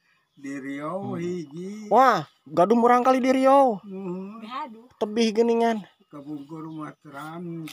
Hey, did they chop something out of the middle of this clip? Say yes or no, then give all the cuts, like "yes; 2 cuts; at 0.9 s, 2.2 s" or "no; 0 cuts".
no; 0 cuts